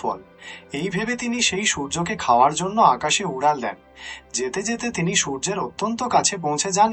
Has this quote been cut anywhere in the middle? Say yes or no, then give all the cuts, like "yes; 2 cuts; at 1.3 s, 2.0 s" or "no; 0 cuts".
no; 0 cuts